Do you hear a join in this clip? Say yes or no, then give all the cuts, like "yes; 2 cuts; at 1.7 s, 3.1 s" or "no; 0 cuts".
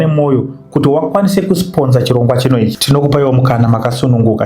yes; 1 cut; at 2.8 s